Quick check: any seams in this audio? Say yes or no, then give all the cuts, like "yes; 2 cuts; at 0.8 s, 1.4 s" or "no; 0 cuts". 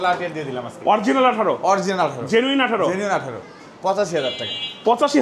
yes; 1 cut; at 3.5 s